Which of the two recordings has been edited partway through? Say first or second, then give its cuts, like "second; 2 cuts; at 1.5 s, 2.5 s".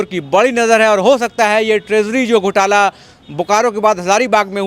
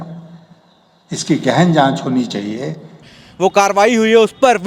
second; 1 cut; at 3.2 s